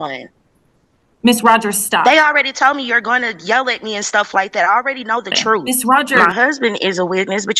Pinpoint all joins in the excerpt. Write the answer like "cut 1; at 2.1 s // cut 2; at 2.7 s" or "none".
cut 1; at 6.2 s